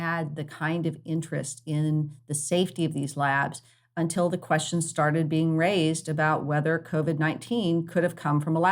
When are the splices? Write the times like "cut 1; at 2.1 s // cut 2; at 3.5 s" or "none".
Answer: none